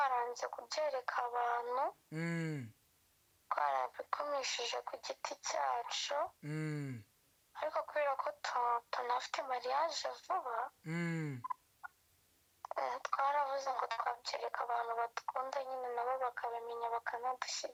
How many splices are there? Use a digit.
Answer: 0